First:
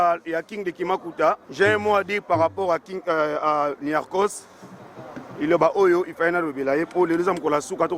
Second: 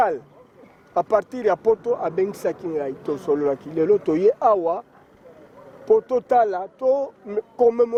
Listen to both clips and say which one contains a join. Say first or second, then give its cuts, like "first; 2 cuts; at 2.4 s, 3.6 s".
first; 1 cut; at 1.5 s